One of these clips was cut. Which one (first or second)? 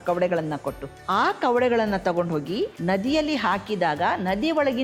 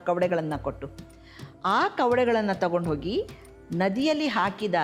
first